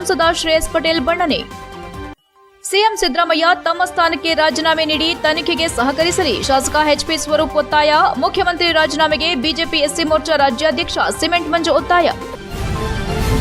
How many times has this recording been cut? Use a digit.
1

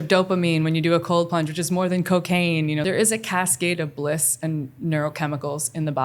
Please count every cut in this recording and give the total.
1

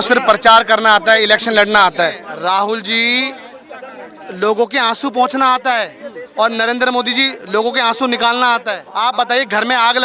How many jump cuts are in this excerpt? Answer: 2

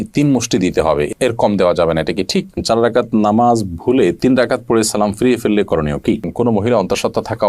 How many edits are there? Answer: 2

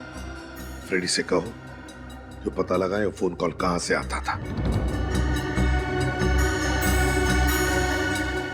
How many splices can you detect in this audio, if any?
1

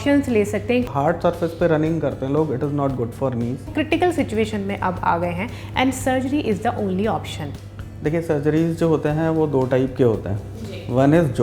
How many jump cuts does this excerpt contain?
3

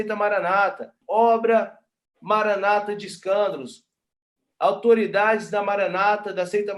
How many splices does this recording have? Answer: 2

